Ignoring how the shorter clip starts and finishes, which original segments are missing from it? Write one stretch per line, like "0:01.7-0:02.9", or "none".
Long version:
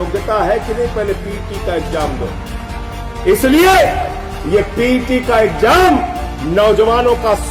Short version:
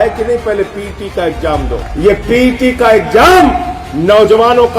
0:02.3-0:04.3